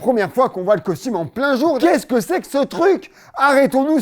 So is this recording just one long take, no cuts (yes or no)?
no